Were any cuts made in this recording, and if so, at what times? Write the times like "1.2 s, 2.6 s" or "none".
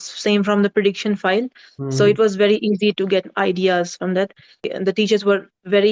4.7 s